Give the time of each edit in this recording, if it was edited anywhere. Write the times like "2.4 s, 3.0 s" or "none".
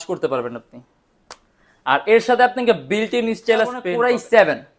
3.9 s